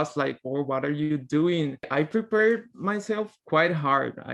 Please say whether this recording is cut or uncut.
cut